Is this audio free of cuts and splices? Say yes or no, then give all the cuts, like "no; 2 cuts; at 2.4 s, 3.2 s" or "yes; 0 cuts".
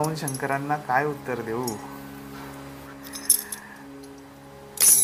yes; 0 cuts